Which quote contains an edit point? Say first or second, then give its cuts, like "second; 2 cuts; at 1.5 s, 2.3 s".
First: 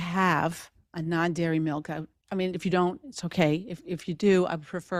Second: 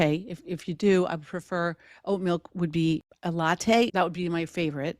second; 2 cuts; at 3.1 s, 3.9 s